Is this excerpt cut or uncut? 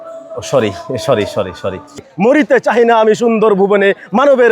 cut